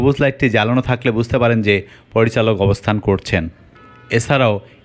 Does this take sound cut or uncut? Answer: uncut